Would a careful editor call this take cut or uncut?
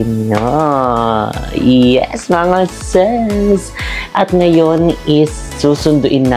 uncut